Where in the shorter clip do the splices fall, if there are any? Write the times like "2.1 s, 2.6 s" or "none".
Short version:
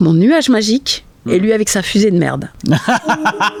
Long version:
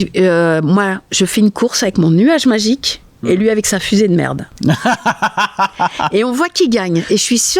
none